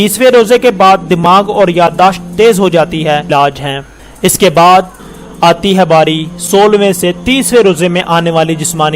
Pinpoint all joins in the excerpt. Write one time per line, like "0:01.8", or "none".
0:03.3